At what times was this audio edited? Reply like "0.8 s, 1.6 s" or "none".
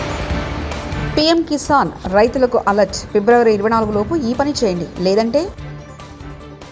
1.1 s